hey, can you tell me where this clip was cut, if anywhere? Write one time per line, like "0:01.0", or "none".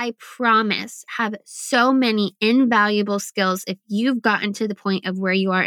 none